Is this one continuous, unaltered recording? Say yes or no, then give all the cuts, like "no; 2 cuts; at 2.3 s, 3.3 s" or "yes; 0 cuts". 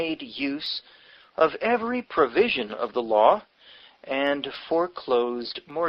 no; 1 cut; at 4.5 s